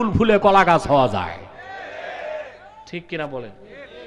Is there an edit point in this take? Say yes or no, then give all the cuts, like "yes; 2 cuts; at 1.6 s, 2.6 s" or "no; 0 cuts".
no; 0 cuts